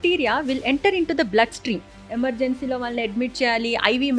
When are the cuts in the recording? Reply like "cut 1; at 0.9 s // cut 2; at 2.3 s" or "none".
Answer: cut 1; at 2.0 s

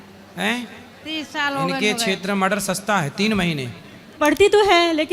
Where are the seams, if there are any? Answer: cut 1; at 4.1 s

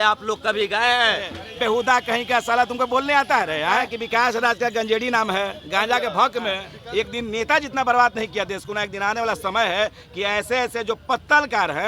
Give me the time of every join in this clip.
cut 1; at 1.4 s // cut 2; at 4.0 s // cut 3; at 6.7 s

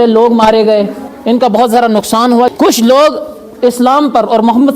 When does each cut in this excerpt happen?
cut 1; at 2.5 s

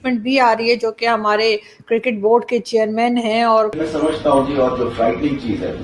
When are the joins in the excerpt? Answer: cut 1; at 3.8 s

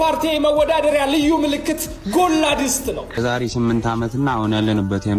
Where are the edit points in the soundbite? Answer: cut 1; at 3.1 s

